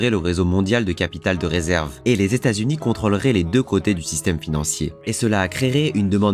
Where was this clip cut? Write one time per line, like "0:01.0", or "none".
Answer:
0:01.9
0:04.9